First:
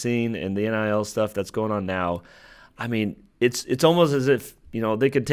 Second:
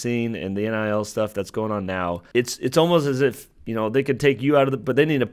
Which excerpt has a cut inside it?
second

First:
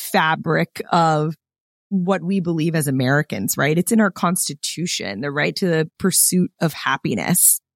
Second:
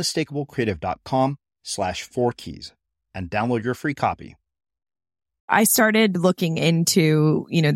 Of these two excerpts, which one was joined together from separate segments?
second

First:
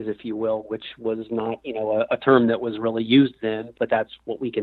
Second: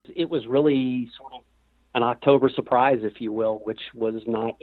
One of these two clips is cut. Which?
first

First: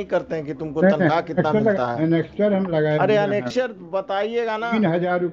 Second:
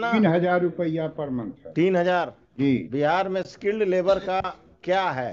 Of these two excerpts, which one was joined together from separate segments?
second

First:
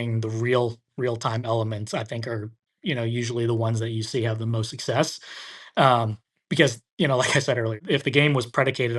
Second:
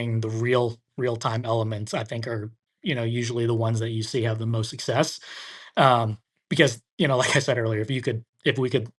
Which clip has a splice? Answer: first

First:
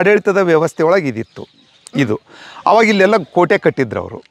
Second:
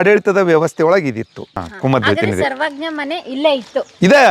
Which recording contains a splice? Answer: second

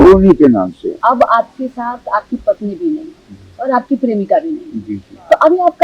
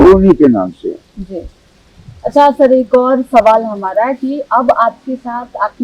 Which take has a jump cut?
first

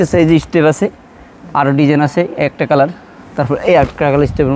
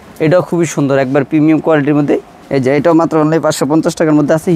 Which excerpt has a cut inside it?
second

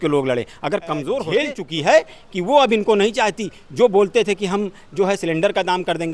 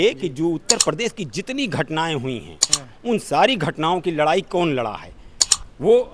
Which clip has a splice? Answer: first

